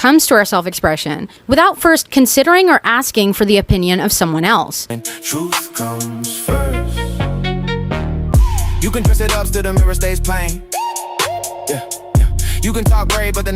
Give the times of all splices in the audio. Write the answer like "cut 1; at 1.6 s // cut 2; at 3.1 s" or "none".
cut 1; at 4.8 s // cut 2; at 8.2 s